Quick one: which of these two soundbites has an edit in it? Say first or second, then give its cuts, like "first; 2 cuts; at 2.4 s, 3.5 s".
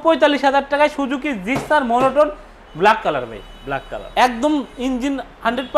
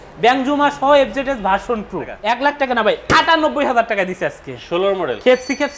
second; 1 cut; at 2.2 s